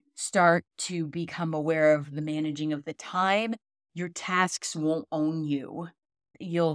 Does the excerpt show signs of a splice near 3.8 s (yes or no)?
no